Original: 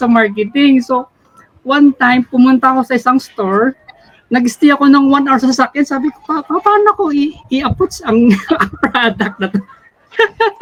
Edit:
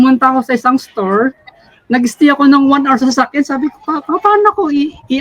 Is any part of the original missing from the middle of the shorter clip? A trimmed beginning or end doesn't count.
no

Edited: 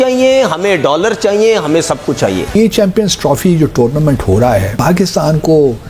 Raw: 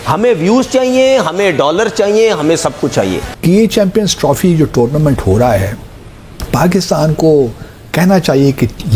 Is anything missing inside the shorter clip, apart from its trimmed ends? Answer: yes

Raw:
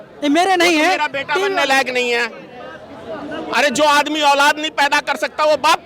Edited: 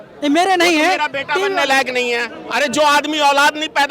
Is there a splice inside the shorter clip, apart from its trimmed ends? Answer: yes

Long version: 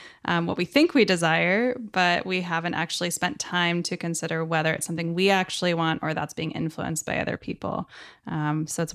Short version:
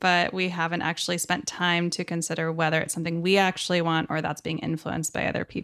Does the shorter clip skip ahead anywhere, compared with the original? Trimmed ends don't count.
no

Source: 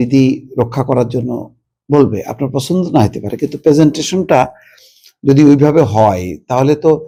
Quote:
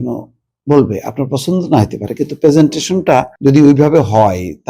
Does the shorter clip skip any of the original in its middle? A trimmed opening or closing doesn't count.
yes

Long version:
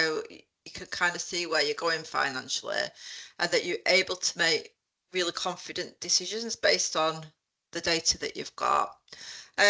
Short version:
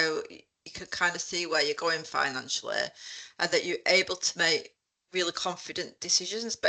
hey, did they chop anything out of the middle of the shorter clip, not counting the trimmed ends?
no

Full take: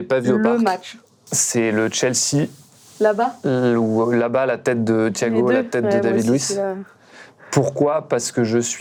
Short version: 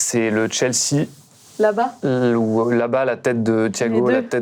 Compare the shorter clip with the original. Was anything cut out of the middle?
no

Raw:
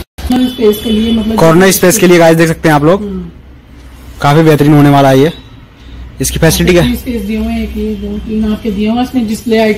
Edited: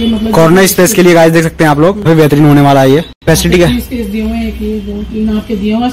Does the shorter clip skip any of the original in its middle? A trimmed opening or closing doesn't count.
yes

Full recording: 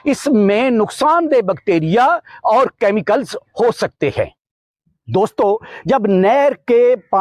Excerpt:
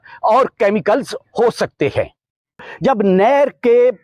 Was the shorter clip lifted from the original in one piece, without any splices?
no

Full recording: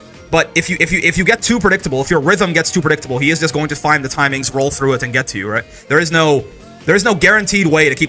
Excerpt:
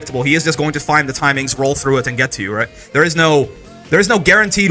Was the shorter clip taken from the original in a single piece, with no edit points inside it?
yes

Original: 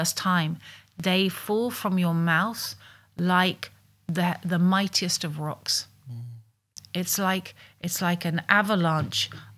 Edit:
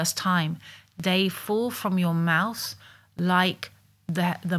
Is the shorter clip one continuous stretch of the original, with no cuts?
yes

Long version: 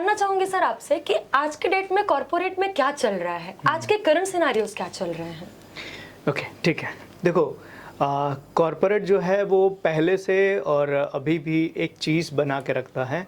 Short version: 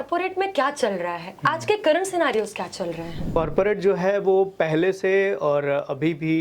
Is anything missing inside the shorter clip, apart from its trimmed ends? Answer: yes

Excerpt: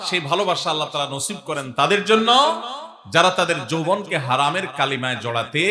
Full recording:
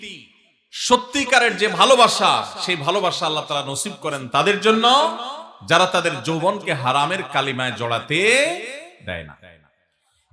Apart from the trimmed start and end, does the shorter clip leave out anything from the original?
no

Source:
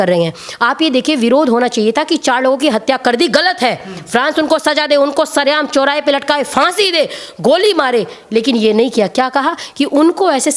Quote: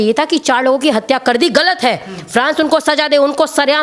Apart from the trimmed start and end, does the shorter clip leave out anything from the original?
no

